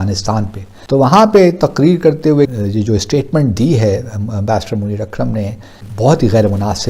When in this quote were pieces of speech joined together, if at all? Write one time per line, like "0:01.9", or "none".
0:02.5
0:05.8